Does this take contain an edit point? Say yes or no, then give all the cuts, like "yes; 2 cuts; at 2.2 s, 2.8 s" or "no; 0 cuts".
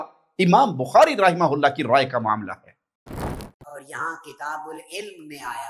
yes; 1 cut; at 3.2 s